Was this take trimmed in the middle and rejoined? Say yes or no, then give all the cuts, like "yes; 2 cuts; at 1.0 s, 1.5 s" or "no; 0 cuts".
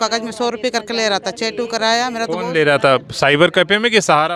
no; 0 cuts